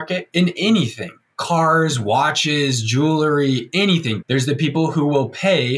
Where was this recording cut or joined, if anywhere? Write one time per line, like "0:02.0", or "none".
0:01.2
0:04.2

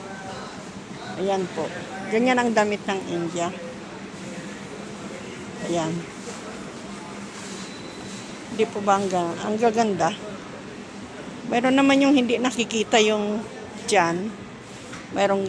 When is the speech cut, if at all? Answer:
0:07.4

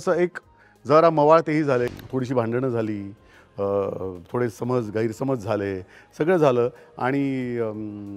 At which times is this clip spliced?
0:01.9

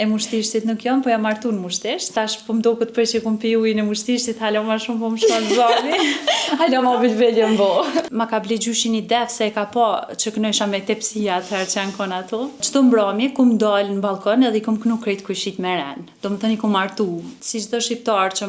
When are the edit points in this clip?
0:02.1
0:08.1
0:12.6
0:17.3

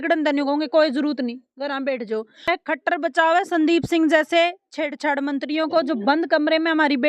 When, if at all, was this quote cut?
0:02.5

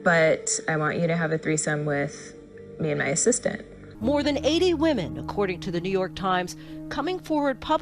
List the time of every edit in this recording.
0:03.8

